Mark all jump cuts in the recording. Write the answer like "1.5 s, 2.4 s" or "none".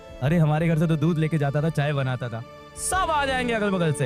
none